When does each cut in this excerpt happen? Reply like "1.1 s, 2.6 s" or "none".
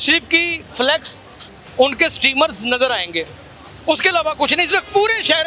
none